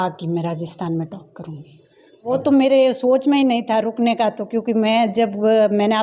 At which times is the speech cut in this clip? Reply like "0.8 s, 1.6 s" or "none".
2.3 s

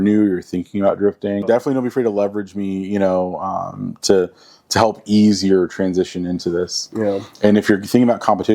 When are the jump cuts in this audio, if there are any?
1.4 s

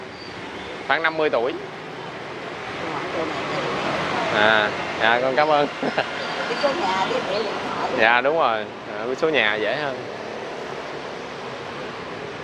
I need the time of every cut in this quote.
none

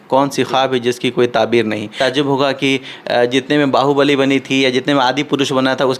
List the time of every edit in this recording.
2.0 s

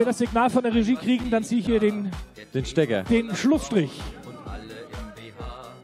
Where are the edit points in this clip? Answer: none

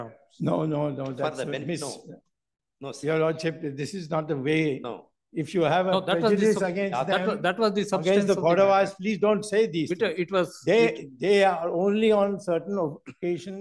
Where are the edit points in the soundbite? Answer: none

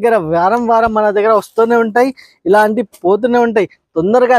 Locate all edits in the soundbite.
none

